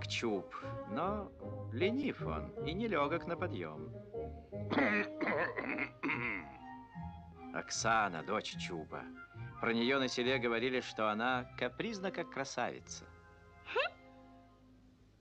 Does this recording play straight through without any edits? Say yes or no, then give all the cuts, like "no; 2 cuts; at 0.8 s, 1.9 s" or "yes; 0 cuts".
no; 1 cut; at 9.0 s